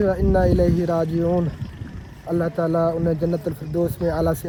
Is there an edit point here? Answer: no; 0 cuts

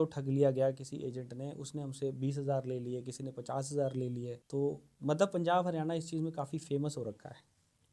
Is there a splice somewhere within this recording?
yes; 1 cut; at 4.4 s

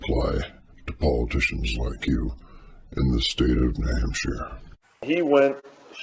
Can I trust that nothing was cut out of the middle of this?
no; 1 cut; at 4.7 s

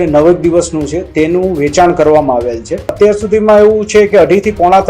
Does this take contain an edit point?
yes; 1 cut; at 2.9 s

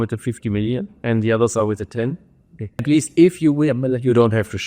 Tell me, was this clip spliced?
yes; 1 cut; at 2.8 s

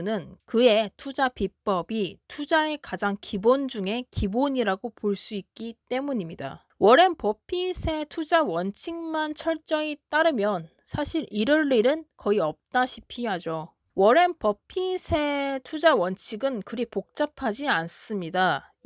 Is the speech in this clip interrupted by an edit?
yes; 2 cuts; at 6.6 s, 13.8 s

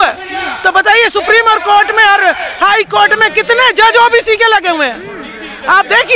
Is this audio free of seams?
yes; 0 cuts

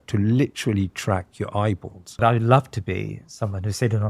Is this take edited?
yes; 1 cut; at 2.2 s

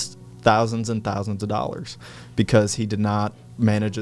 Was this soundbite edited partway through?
no; 0 cuts

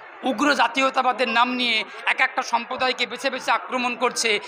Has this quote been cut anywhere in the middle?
no; 0 cuts

